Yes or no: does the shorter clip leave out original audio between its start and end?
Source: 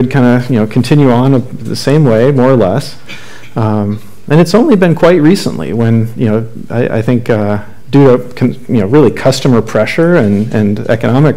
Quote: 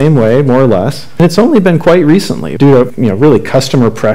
yes